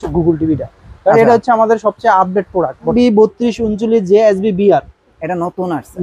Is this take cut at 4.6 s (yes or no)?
no